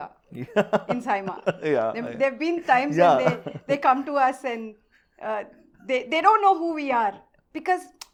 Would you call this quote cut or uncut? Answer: uncut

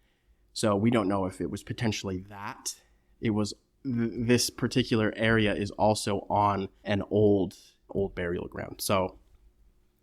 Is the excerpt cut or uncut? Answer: cut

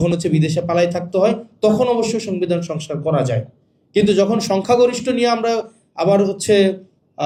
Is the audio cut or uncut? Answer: uncut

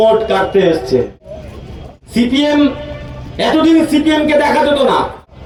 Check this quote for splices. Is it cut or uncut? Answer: uncut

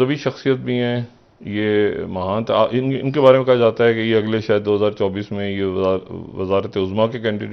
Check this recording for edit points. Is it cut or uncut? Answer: uncut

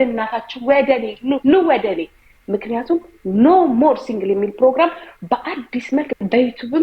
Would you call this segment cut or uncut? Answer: uncut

